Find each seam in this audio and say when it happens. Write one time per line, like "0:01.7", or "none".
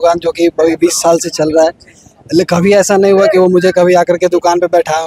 none

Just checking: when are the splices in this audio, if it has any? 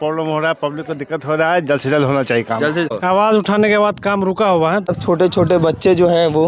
0:02.9
0:05.0

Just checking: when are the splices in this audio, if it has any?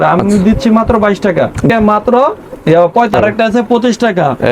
0:01.7
0:03.1

